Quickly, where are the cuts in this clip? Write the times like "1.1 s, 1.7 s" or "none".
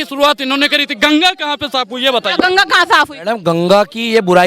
none